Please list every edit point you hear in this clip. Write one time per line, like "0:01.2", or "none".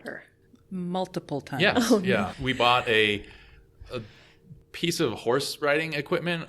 0:02.3